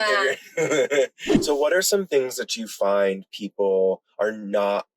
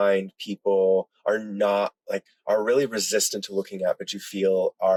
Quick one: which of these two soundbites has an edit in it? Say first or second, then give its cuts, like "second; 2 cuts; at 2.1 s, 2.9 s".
first; 1 cut; at 1.3 s